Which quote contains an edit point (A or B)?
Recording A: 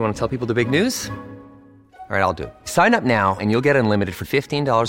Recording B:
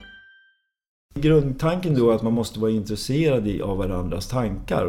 B